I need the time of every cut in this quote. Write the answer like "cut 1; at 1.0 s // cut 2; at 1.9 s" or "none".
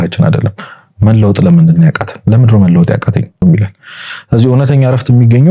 cut 1; at 3.4 s